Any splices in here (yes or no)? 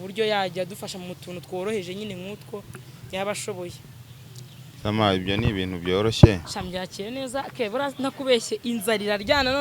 yes